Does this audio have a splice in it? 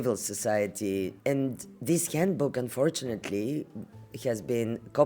yes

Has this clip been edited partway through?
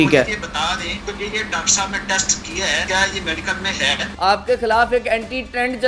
yes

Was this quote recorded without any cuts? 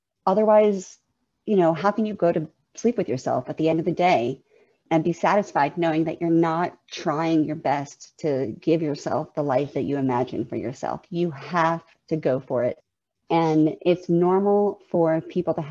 yes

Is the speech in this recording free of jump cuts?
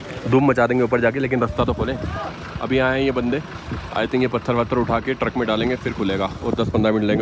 yes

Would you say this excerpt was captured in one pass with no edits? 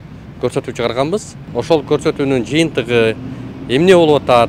no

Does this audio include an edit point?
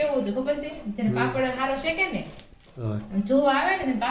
no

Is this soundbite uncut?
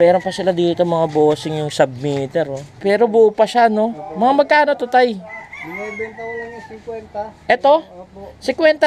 no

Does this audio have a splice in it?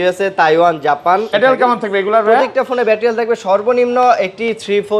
yes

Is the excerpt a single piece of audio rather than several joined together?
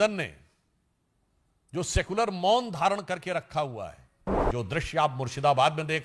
no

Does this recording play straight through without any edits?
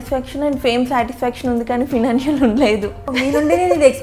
no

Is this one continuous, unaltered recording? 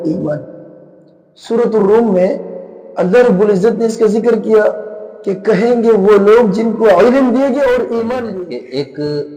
no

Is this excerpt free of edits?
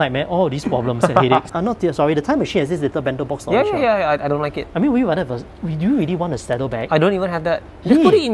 no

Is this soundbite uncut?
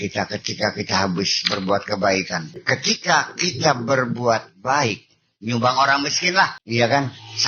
no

